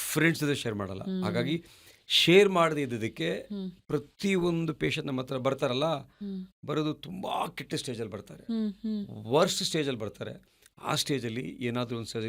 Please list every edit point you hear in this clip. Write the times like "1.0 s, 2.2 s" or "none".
none